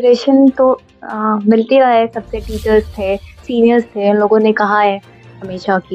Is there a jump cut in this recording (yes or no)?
no